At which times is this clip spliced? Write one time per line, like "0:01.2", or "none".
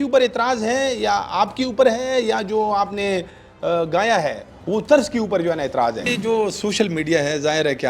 0:06.1